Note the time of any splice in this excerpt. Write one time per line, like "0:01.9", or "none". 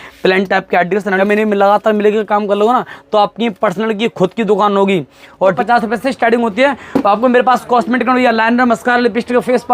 0:01.2
0:05.6